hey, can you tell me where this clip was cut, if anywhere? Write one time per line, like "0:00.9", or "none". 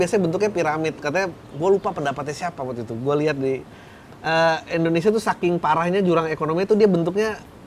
none